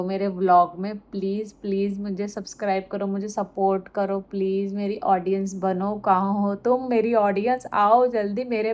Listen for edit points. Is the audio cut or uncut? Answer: uncut